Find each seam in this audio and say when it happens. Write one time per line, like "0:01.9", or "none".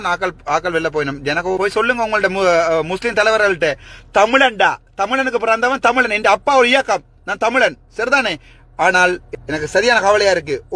0:01.6
0:09.3